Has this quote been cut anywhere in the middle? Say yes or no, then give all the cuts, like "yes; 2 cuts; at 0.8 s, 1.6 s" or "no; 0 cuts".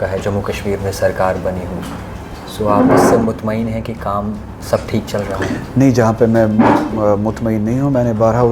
no; 0 cuts